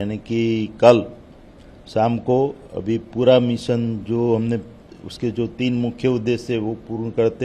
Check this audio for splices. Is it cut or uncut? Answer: uncut